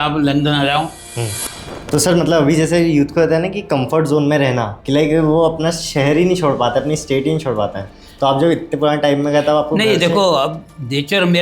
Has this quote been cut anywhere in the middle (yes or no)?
yes